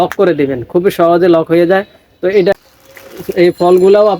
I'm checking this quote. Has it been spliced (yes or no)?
yes